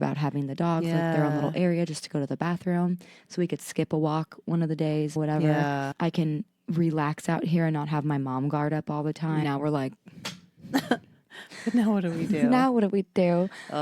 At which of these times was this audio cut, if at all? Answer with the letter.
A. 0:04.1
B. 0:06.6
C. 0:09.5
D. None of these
C